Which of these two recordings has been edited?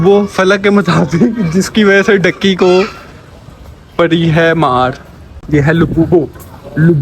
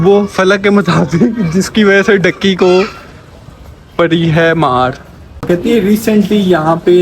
second; 1 cut; at 5.5 s

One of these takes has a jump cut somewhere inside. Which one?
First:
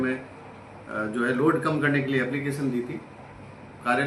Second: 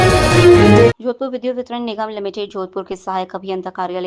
second; 1 cut; at 1.0 s

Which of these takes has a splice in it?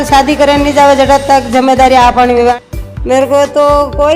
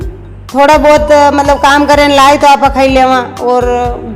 first; 1 cut; at 2.3 s

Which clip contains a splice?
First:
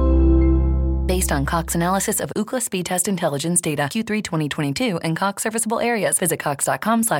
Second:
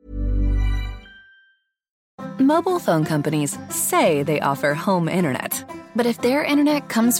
second; 1 cut; at 2.0 s

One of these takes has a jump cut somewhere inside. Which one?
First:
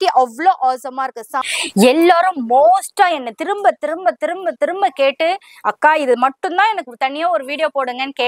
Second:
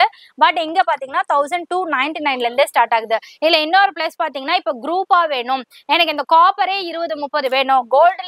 first; 1 cut; at 1.6 s

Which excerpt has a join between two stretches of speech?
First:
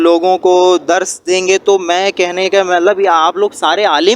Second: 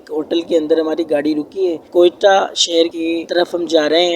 second; 1 cut; at 1.9 s

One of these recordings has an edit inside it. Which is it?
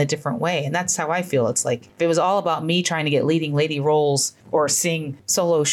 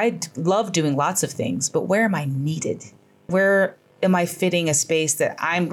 first; 1 cut; at 1.9 s

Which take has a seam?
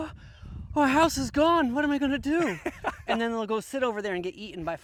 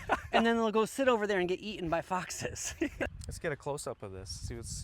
second; 1 cut; at 3.1 s

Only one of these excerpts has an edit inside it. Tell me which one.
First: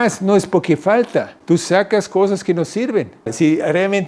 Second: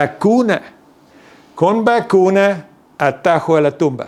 first; 2 cuts; at 1.3 s, 3.3 s

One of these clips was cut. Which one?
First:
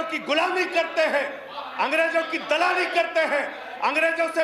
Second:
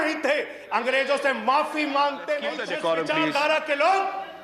second; 1 cut; at 2.6 s

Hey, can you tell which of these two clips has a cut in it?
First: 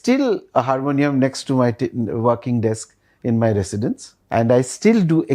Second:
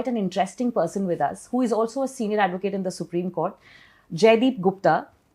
first; 1 cut; at 4.1 s

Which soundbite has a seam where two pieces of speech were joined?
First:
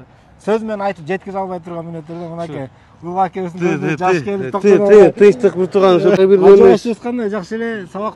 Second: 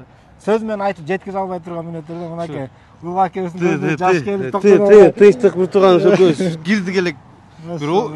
first; 1 cut; at 6.2 s

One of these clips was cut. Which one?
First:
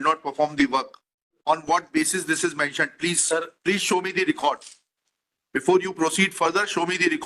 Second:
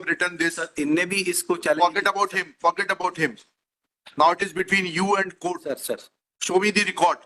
first; 1 cut; at 1.4 s

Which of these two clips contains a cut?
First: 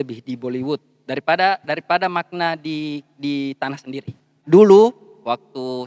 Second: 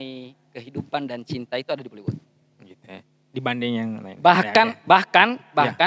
first; 1 cut; at 4.3 s

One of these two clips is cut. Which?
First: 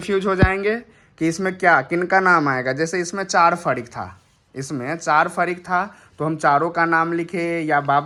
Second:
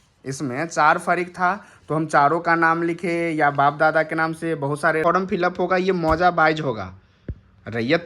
second; 1 cut; at 5.0 s

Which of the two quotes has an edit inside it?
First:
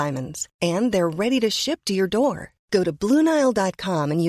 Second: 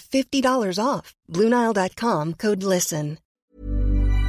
second; 1 cut; at 3.3 s

